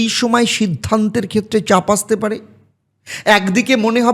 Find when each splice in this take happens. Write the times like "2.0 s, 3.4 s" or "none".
none